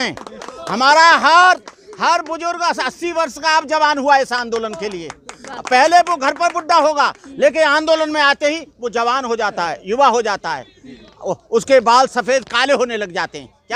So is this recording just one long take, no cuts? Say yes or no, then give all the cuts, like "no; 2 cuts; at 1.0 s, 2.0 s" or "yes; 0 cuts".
yes; 0 cuts